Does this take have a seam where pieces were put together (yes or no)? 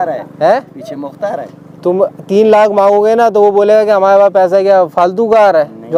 no